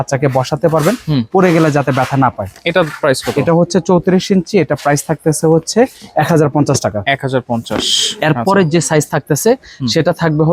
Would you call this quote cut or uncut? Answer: uncut